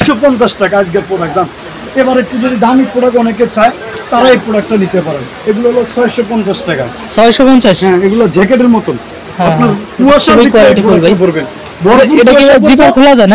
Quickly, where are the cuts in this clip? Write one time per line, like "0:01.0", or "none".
0:01.6